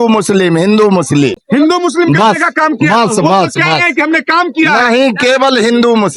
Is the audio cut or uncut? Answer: uncut